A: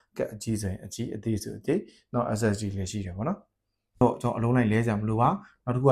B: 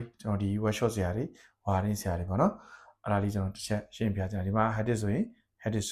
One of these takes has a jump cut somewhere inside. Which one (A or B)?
A